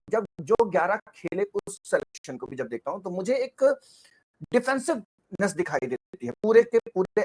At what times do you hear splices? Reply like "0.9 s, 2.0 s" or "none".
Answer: none